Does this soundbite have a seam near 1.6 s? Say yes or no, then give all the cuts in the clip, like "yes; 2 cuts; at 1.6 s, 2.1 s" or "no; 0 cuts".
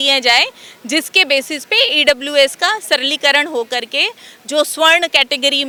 no; 0 cuts